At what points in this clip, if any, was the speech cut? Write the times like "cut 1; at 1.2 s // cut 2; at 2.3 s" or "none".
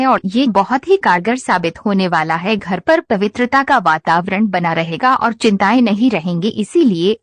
cut 1; at 2.6 s